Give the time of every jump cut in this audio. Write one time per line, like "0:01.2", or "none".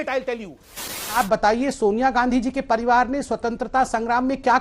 0:00.9